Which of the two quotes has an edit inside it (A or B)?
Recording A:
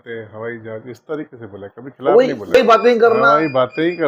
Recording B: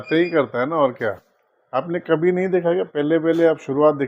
A